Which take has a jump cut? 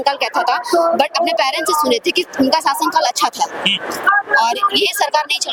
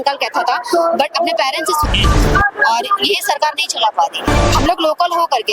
second; 2 cuts; at 1.8 s, 4.3 s

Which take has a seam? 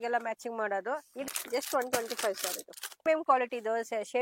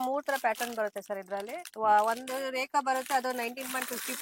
first; 2 cuts; at 1.3 s, 3.0 s

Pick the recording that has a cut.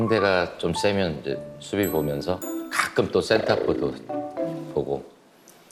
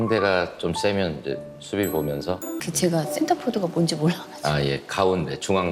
second; 1 cut; at 2.6 s

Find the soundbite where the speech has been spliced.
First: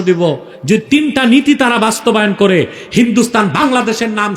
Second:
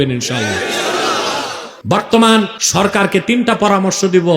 second; 2 cuts; at 1.7 s, 2.6 s

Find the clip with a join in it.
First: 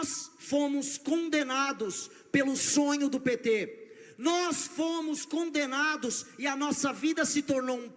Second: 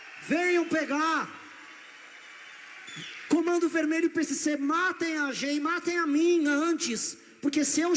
second; 1 cut; at 2.9 s

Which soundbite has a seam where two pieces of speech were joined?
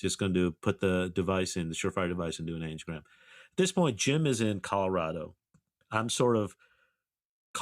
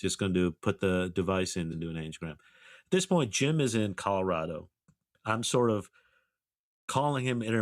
second; 1 cut; at 1.7 s

